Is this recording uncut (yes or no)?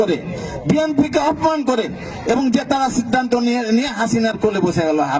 yes